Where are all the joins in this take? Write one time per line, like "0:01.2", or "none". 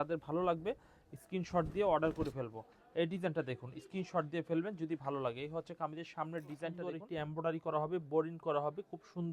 0:06.9